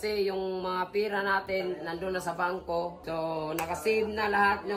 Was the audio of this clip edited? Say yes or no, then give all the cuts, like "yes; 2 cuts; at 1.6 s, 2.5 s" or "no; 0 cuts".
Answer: yes; 1 cut; at 3.0 s